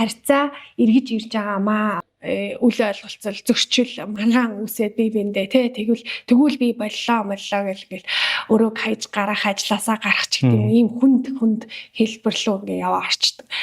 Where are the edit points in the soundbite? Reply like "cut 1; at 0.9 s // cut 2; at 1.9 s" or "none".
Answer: cut 1; at 2.0 s

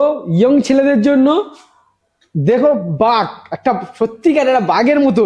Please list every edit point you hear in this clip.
none

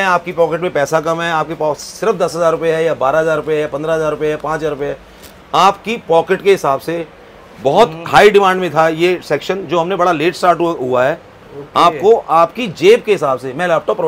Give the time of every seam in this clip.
none

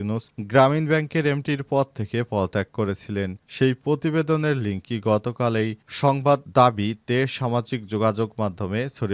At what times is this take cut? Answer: none

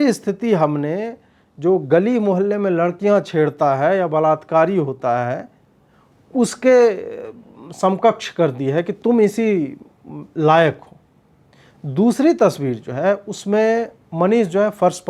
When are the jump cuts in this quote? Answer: none

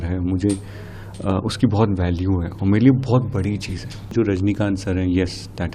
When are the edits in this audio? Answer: cut 1; at 4.1 s

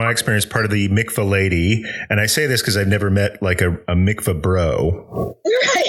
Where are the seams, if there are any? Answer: none

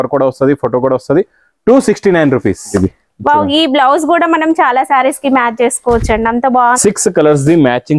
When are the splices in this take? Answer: cut 1; at 2.7 s // cut 2; at 6.8 s

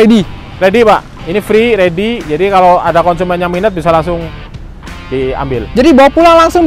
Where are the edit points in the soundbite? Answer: none

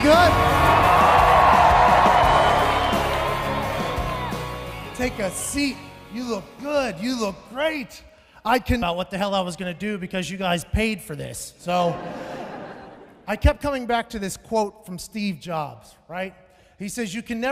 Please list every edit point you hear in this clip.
none

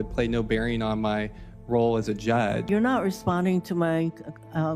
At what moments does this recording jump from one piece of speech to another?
cut 1; at 2.7 s

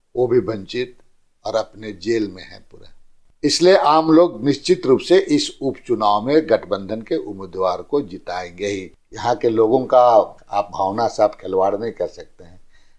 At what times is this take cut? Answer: cut 1; at 3.2 s // cut 2; at 8.9 s

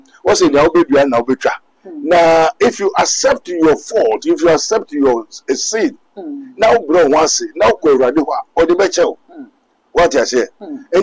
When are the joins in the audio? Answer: none

